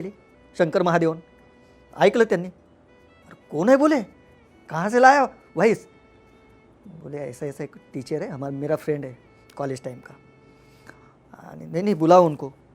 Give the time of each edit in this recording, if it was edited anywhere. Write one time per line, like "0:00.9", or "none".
none